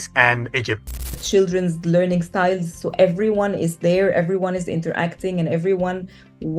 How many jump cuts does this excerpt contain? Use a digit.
1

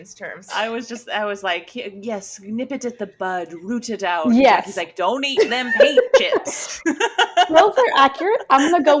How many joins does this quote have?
0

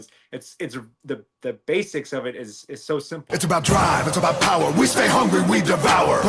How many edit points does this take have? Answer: 1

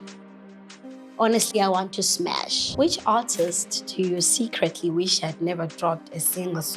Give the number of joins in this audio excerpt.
1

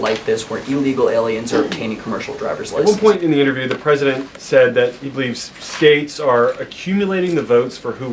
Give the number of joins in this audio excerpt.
1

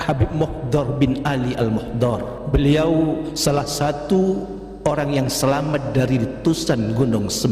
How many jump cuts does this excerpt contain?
2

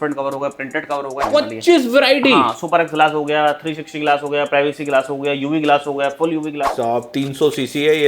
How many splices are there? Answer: 2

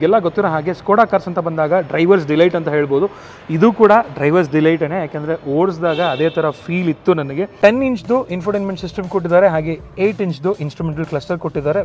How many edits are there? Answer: 1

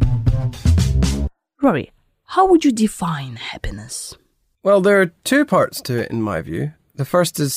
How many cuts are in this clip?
1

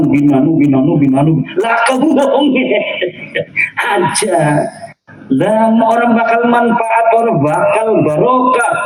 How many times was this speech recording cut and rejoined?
0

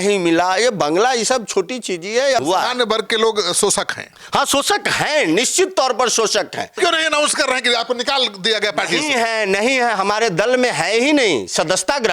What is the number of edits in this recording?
2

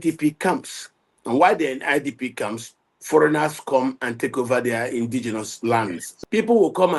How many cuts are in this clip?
1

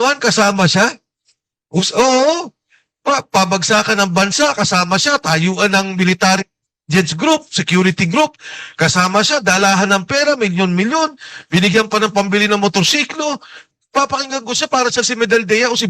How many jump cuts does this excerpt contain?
1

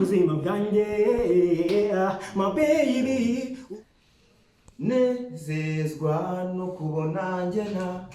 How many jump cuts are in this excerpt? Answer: 1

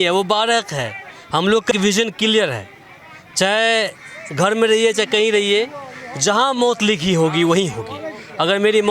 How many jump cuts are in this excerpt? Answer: 1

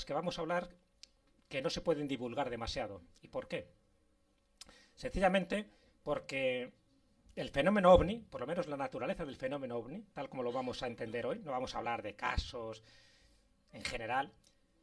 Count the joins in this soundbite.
1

